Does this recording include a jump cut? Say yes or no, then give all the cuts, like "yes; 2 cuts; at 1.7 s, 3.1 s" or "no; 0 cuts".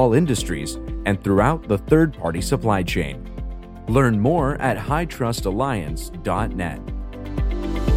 yes; 1 cut; at 7.0 s